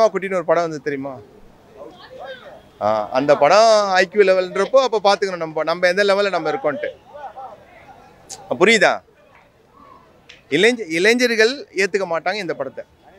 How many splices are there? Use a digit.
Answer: 0